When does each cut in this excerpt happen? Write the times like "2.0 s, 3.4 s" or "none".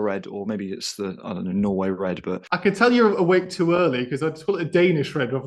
2.5 s